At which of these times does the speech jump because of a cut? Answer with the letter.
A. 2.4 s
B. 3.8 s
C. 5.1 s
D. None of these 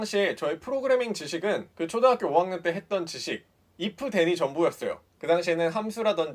D